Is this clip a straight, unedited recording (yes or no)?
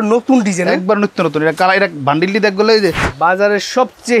no